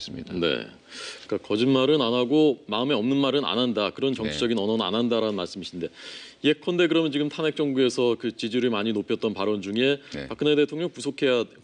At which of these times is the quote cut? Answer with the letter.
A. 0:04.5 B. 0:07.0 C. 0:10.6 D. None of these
B